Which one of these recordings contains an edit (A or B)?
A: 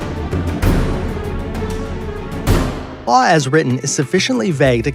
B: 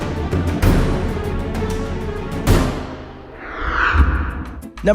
B